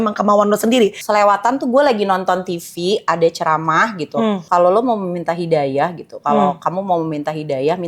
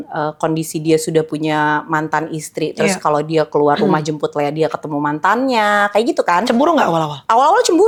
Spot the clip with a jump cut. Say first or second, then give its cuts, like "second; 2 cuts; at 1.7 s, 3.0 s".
first; 2 cuts; at 1.0 s, 4.4 s